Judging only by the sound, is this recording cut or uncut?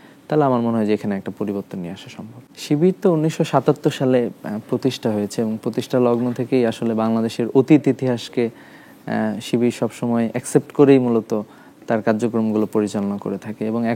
cut